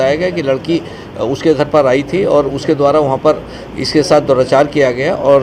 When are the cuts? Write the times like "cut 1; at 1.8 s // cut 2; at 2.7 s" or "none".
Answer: none